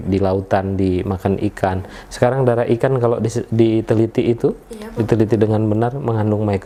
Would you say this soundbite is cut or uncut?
uncut